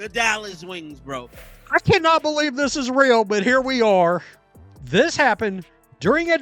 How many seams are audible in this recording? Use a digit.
1